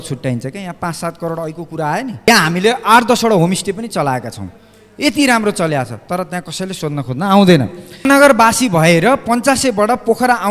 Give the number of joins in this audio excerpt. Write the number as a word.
two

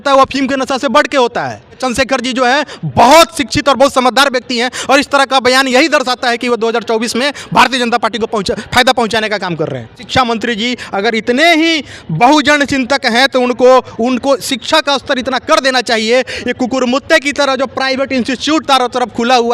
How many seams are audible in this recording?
two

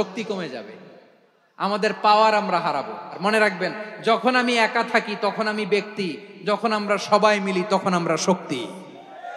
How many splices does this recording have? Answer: one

